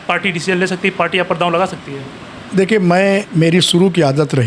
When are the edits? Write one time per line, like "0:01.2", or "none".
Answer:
none